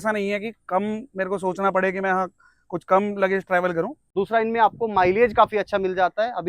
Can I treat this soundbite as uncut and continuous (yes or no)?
no